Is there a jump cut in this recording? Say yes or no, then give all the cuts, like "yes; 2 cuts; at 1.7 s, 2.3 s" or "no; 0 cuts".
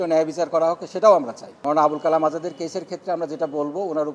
yes; 1 cut; at 1.5 s